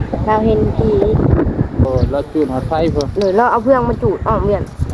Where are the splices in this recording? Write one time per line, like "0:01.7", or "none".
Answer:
0:01.9